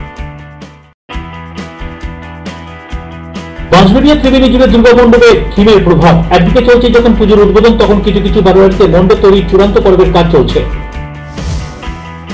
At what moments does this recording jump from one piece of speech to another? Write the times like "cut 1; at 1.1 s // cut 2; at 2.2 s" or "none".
cut 1; at 1.0 s